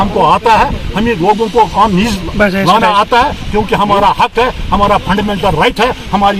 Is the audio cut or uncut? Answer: uncut